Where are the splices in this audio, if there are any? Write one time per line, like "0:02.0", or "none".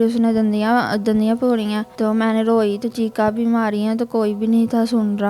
0:01.9